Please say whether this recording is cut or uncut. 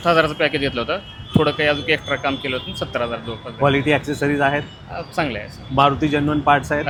uncut